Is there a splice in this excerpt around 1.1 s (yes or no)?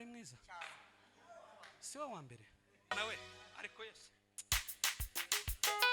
no